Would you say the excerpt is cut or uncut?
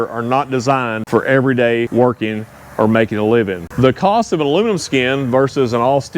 cut